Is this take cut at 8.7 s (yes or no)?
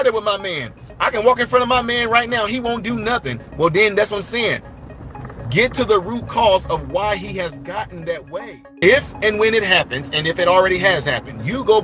yes